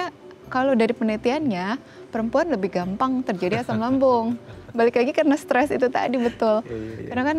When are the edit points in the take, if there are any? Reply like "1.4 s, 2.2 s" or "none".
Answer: none